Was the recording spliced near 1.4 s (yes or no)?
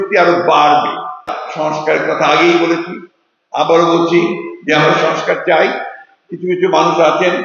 yes